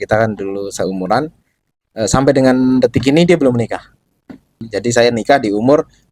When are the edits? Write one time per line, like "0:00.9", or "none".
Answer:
0:04.6